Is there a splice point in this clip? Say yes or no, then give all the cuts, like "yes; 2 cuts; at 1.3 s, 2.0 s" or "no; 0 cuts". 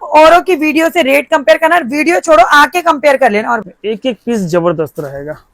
yes; 1 cut; at 3.7 s